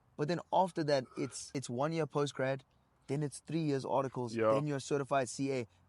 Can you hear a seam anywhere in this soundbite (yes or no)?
yes